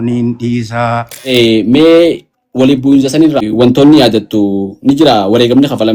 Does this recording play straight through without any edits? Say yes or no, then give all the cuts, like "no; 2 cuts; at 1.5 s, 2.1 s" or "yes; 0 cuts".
no; 2 cuts; at 1.2 s, 3.5 s